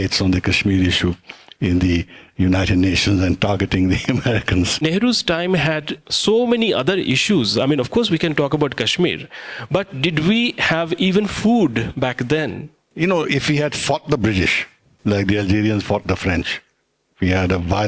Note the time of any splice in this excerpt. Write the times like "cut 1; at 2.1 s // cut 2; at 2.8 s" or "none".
cut 1; at 4.8 s // cut 2; at 12.8 s